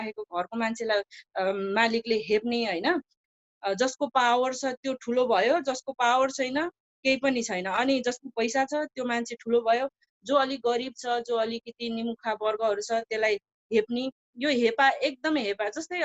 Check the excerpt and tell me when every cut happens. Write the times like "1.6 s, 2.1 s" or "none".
3.2 s